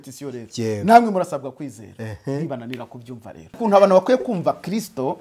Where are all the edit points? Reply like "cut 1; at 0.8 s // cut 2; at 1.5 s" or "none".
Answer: cut 1; at 3.6 s